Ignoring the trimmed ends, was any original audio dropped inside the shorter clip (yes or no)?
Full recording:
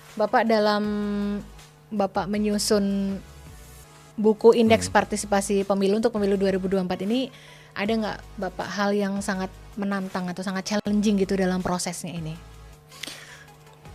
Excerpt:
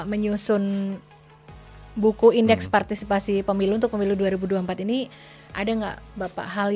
no